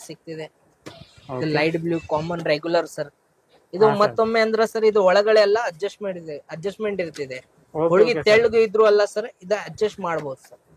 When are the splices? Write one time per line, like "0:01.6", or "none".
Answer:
none